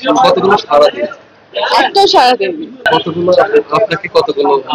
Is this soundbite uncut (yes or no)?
no